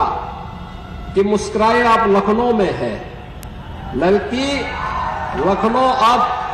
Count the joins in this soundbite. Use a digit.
0